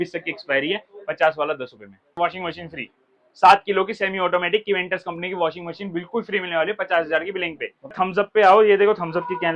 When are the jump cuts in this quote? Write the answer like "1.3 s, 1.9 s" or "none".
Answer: 2.1 s, 7.9 s